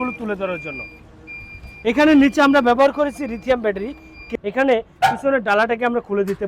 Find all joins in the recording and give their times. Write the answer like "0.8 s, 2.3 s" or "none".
4.2 s